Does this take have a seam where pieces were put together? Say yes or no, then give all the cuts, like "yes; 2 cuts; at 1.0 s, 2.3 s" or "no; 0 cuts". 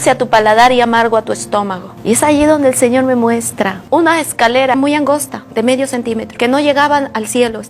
yes; 2 cuts; at 1.9 s, 4.7 s